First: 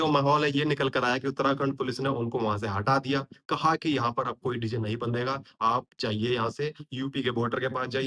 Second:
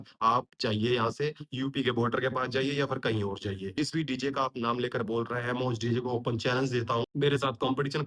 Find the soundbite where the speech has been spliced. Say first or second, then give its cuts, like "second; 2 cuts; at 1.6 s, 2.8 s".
second; 1 cut; at 3.6 s